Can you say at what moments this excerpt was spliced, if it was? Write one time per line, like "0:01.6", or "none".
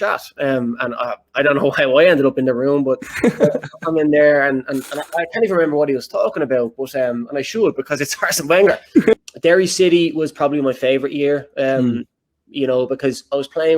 0:09.1